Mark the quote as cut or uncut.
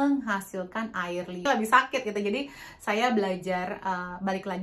cut